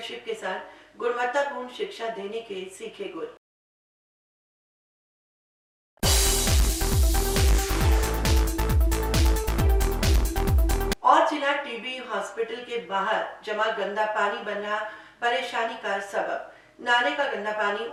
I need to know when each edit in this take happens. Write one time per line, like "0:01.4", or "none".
none